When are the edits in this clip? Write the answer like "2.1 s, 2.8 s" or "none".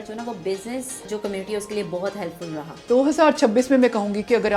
1.1 s, 2.7 s